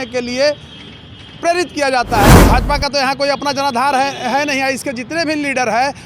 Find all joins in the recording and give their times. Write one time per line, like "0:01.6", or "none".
0:02.4